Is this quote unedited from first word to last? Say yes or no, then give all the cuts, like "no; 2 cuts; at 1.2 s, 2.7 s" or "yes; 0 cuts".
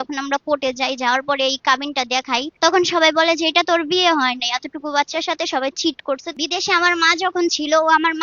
no; 2 cuts; at 2.5 s, 6.3 s